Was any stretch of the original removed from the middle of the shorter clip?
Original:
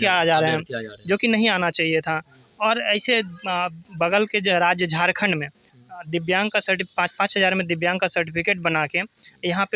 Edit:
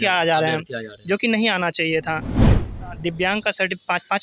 yes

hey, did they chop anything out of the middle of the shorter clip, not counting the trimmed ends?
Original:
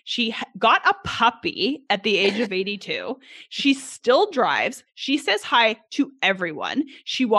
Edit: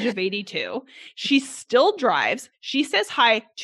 no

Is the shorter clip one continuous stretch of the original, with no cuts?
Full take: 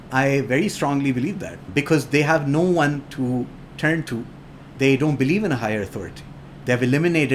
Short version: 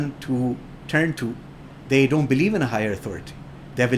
yes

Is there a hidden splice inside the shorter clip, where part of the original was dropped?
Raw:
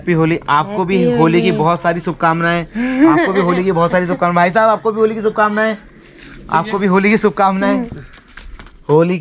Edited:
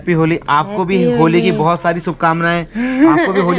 no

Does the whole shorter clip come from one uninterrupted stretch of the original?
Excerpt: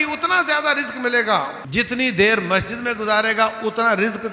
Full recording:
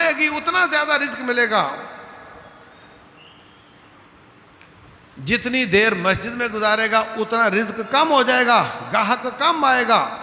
no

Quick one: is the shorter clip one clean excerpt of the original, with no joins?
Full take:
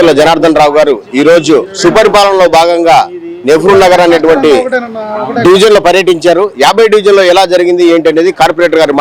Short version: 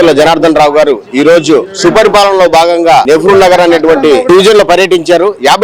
no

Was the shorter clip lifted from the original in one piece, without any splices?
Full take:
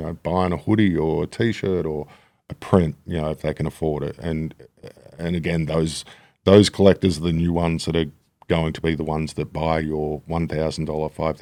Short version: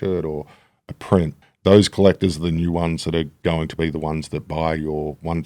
no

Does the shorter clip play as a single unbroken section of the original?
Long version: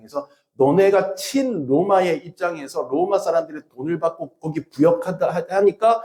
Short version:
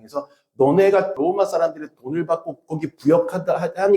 no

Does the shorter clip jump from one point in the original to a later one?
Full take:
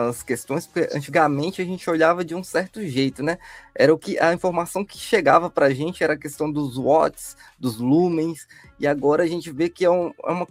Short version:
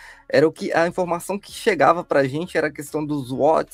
no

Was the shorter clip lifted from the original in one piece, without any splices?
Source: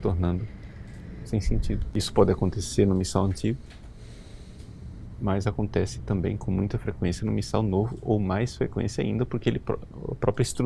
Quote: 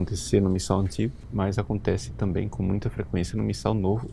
no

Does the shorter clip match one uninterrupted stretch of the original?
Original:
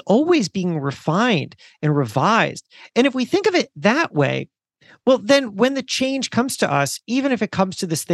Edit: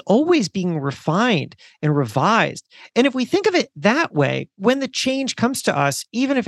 no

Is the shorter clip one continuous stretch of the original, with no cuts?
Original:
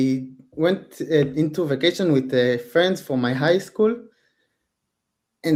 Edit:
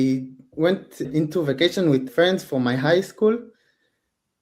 no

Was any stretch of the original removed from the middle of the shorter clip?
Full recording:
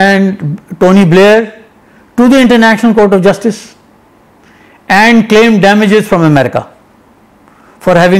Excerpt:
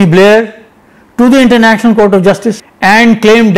yes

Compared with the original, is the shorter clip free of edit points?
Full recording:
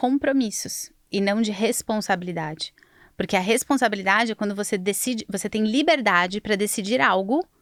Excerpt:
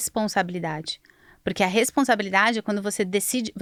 yes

